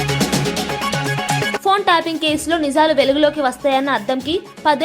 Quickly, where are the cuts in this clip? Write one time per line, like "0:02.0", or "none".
0:01.6